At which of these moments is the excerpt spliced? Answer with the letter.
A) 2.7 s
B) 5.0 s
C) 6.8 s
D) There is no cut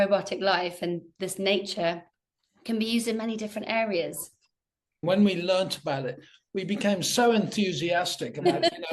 B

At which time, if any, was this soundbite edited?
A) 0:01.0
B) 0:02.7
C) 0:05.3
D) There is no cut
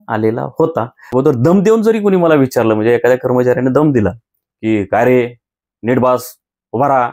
A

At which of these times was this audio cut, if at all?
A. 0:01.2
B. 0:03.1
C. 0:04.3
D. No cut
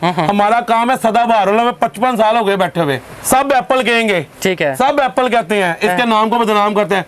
B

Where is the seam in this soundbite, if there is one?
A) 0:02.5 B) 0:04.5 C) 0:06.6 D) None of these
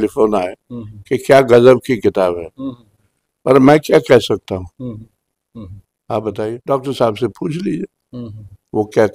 C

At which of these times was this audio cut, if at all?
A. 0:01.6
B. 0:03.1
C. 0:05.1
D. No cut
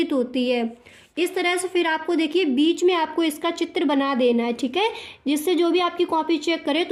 D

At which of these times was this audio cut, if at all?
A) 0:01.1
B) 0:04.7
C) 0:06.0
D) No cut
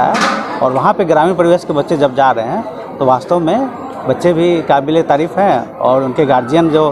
D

